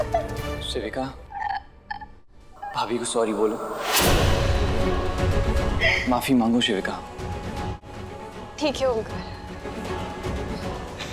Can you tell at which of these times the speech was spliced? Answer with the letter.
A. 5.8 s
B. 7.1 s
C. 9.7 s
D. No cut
A